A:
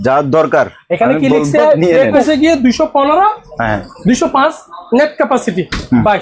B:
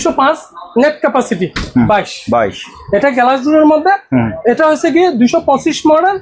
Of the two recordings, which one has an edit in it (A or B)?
A